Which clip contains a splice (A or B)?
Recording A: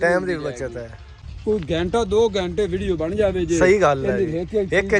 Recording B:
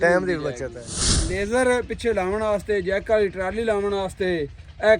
B